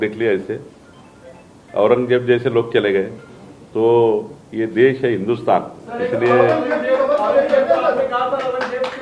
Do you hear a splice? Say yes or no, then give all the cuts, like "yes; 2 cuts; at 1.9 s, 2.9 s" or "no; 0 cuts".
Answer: no; 0 cuts